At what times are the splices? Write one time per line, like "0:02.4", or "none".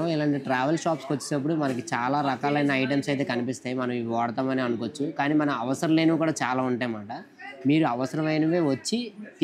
none